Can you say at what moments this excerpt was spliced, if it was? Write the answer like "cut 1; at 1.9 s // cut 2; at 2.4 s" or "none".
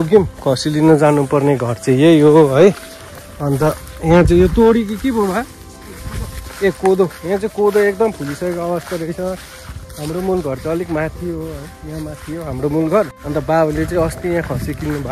none